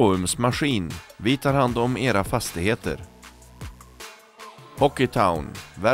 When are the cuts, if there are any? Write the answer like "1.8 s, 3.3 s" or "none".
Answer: none